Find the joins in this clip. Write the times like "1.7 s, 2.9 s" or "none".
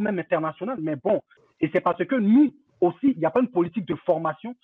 1.3 s